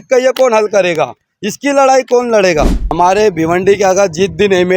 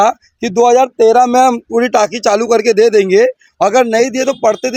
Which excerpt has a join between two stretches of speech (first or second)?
first